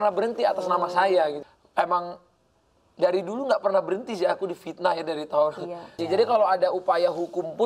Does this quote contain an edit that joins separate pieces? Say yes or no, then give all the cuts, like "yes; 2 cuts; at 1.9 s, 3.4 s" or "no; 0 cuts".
yes; 2 cuts; at 1.4 s, 6.0 s